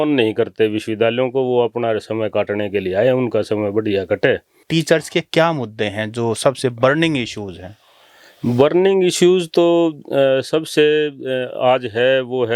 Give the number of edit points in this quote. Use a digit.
1